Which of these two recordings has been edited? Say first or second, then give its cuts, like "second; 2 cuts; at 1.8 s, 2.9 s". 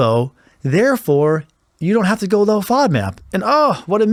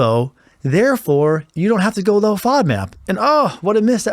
second; 1 cut; at 1.5 s